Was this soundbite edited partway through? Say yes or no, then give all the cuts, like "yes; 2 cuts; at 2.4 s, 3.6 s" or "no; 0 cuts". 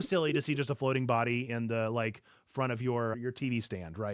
yes; 1 cut; at 3.2 s